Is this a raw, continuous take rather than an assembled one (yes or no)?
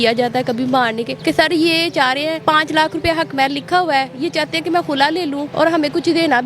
no